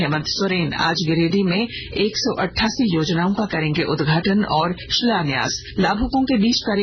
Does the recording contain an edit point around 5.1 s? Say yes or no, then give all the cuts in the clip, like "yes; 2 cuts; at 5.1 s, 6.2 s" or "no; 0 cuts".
yes; 1 cut; at 5.1 s